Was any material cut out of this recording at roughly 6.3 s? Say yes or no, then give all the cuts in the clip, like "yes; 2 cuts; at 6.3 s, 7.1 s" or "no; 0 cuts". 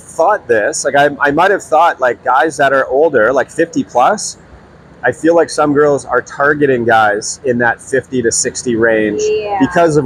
no; 0 cuts